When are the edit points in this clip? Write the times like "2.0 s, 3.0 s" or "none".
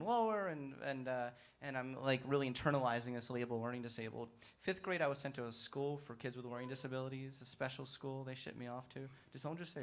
3.2 s